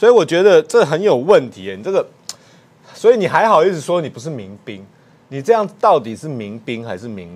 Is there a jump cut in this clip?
no; 0 cuts

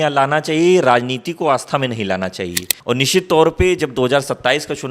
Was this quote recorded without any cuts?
no; 1 cut; at 2.7 s

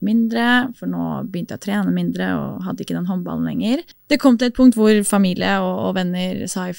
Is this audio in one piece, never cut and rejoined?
no; 1 cut; at 3.9 s

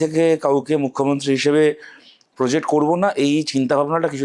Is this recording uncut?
yes; 0 cuts

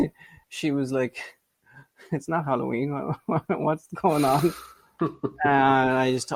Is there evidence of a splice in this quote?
no; 0 cuts

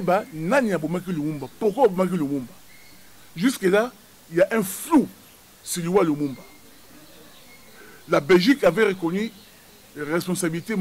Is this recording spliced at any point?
no; 0 cuts

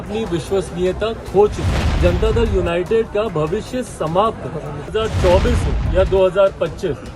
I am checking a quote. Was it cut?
yes; 2 cuts; at 1.9 s, 4.9 s

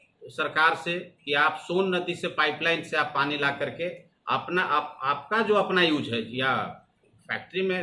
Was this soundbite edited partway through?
no; 0 cuts

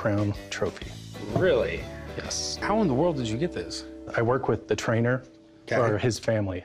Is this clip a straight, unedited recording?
no; 1 cut; at 2.6 s

